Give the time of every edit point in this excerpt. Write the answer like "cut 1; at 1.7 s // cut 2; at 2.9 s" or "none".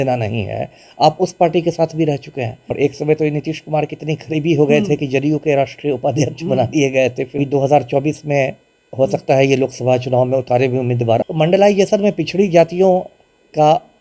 cut 1; at 2.6 s // cut 2; at 7.4 s // cut 3; at 11.2 s